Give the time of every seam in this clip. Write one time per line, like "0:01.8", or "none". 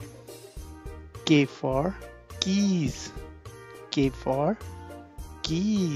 0:00.9